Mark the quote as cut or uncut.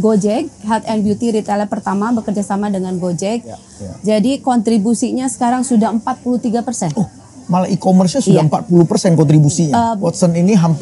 cut